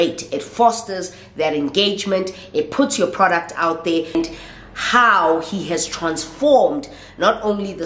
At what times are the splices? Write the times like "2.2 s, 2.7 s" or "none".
4.1 s